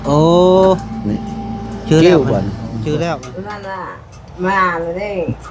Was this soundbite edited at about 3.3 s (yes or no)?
yes